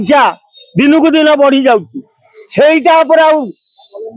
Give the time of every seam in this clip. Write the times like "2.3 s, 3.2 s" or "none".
none